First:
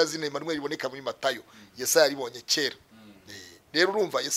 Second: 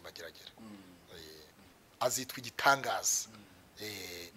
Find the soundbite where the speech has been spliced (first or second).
second